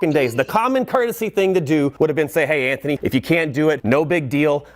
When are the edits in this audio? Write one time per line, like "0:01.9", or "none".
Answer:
0:01.9
0:03.0
0:03.8